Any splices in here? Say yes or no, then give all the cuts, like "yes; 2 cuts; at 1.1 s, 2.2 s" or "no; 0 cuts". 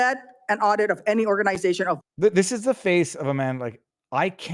no; 0 cuts